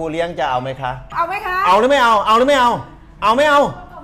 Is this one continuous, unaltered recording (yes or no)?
no